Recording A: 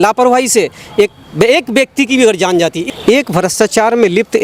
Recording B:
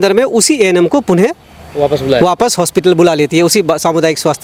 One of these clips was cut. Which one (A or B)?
A